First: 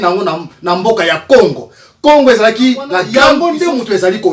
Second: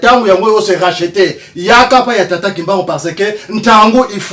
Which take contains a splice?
first; 1 cut; at 3.1 s

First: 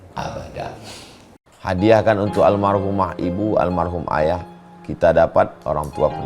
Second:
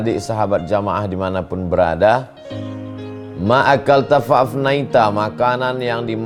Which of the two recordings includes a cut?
first; 1 cut; at 1.3 s

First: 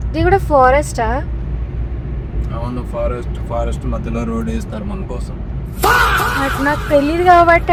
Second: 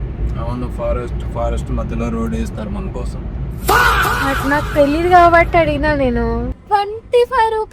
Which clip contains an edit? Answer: second; 1 cut; at 6.5 s

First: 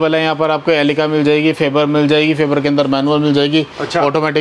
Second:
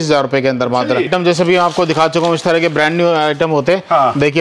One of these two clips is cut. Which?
second; 1 cut; at 1.1 s

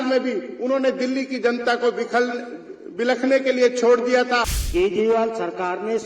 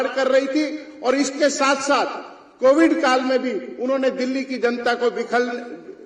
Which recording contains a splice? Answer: first; 1 cut; at 4.6 s

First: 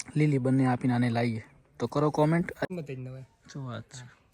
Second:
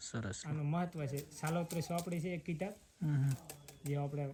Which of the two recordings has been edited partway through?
first; 1 cut; at 2.7 s

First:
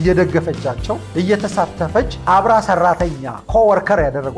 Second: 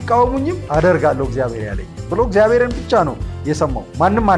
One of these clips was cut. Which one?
first; 2 cuts; at 1.0 s, 2.1 s

